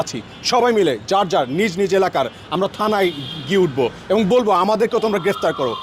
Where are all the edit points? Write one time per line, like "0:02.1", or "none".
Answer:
none